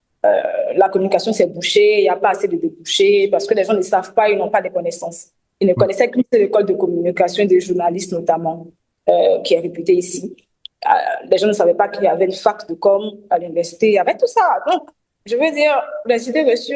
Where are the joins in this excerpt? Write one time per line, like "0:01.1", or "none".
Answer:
none